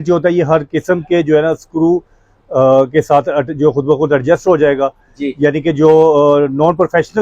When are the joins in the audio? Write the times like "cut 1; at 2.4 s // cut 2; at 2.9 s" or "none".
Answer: none